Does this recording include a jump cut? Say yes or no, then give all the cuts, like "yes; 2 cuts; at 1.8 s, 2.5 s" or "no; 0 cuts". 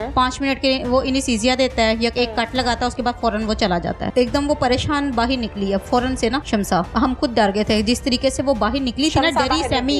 yes; 2 cuts; at 4.0 s, 6.8 s